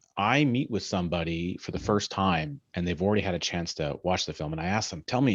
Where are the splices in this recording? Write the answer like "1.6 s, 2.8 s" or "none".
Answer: none